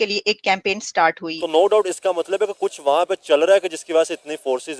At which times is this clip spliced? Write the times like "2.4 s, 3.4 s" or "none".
1.3 s